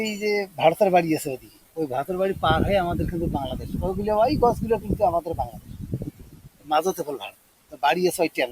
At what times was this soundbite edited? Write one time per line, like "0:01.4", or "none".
0:01.6